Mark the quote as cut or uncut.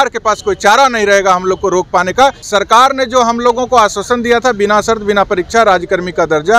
cut